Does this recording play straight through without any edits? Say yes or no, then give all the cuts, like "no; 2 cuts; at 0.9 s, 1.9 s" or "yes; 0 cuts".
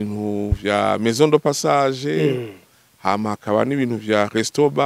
yes; 0 cuts